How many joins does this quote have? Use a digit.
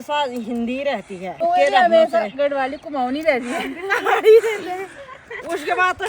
1